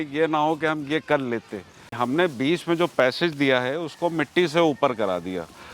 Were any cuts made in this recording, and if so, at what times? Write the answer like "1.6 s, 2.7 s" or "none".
1.8 s